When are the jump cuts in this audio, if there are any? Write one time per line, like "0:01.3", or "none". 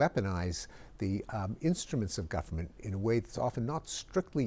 none